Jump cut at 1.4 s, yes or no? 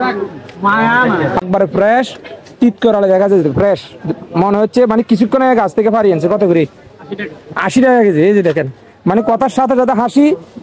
yes